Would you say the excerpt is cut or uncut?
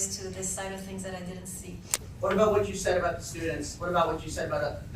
cut